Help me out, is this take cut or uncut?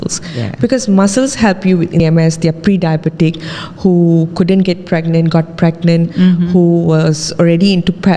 cut